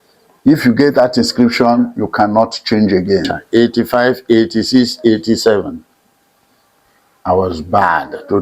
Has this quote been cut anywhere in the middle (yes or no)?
yes